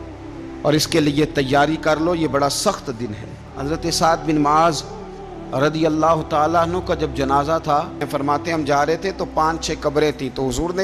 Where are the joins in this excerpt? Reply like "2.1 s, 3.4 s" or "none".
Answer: 3.5 s, 8.1 s